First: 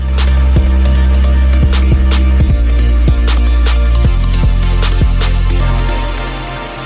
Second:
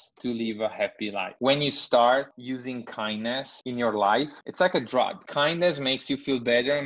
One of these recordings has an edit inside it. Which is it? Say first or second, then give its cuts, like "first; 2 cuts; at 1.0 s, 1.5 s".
second; 5 cuts; at 1.3 s, 2.3 s, 3.5 s, 4.3 s, 5.2 s